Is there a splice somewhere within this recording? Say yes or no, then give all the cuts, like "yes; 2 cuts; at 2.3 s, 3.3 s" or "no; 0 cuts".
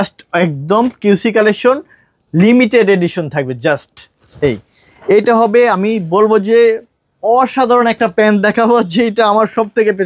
no; 0 cuts